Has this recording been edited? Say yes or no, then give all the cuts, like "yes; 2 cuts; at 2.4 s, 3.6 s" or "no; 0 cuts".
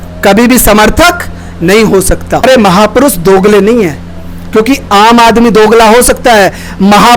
yes; 1 cut; at 2.4 s